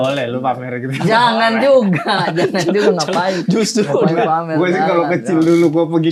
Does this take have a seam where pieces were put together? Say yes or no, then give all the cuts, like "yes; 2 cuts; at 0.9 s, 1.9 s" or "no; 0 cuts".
no; 0 cuts